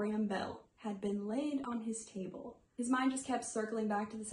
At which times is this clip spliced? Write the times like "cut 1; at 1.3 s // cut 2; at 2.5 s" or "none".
none